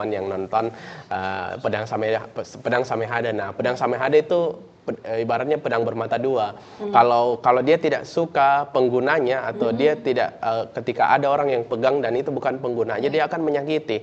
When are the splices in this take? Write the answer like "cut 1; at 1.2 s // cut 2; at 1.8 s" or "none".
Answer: none